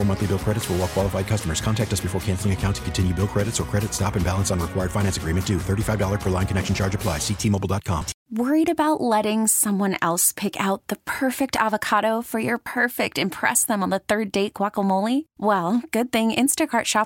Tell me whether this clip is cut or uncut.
cut